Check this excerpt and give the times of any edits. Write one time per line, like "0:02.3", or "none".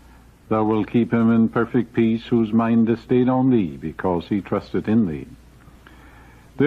0:05.3